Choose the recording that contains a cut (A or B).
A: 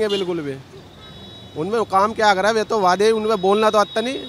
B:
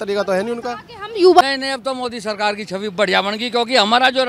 B